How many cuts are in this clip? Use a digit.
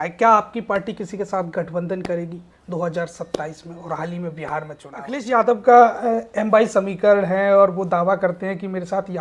1